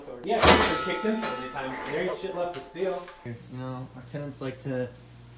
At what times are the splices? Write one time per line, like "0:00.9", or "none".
0:03.3